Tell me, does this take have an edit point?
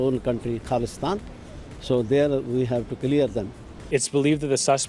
yes; 1 cut; at 3.9 s

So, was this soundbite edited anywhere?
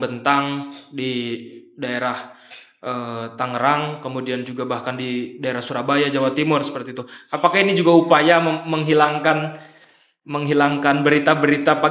no; 0 cuts

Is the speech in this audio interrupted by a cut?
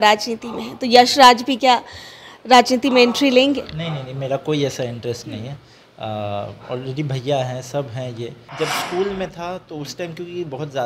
yes; 1 cut; at 8.4 s

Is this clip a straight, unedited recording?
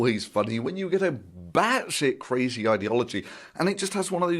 no; 1 cut; at 2.8 s

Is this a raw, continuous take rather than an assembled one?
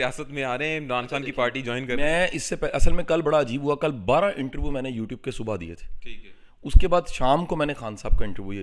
yes; 0 cuts

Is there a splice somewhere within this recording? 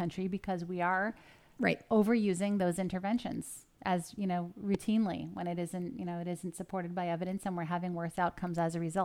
no; 0 cuts

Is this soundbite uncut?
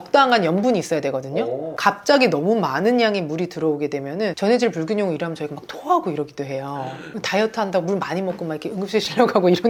yes; 0 cuts

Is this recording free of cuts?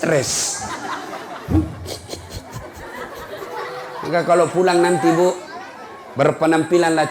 yes; 0 cuts

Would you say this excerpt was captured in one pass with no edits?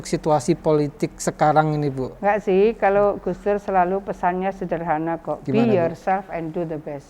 yes; 0 cuts

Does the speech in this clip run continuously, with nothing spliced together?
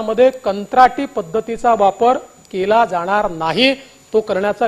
yes; 0 cuts

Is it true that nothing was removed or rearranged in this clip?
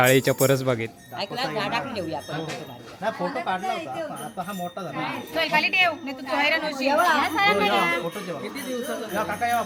yes; 0 cuts

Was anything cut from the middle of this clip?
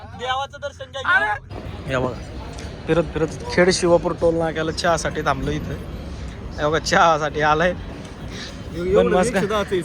yes; 1 cut; at 1.6 s

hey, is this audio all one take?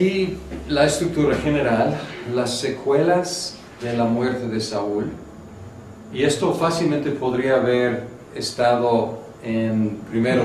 yes; 0 cuts

